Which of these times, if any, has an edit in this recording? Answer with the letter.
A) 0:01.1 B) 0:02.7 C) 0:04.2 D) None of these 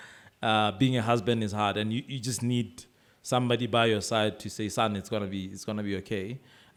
D